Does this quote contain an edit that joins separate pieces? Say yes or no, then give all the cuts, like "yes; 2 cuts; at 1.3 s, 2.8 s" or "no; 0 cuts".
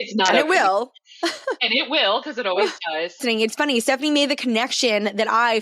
yes; 1 cut; at 3.2 s